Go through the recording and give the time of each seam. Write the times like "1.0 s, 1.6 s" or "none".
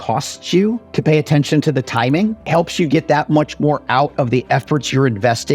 0.9 s, 2.4 s